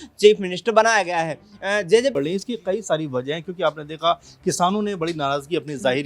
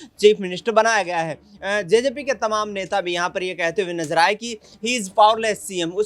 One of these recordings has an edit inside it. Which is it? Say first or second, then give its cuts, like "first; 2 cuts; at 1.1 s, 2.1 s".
first; 1 cut; at 2.1 s